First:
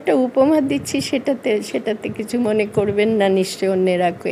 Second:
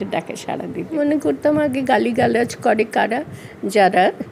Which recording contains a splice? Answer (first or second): second